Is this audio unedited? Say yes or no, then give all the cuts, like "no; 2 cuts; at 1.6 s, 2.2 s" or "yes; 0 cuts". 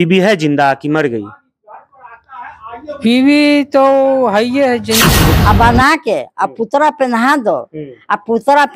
no; 1 cut; at 5.0 s